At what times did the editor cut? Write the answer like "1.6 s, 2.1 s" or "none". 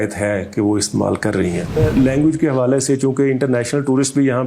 1.8 s